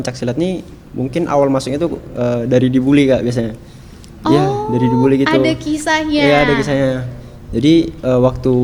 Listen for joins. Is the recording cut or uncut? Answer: uncut